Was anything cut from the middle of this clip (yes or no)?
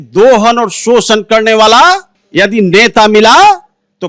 yes